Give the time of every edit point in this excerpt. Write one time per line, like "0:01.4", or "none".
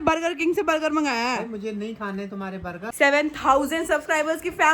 0:02.7